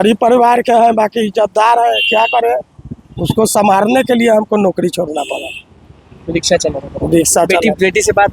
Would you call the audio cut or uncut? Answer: uncut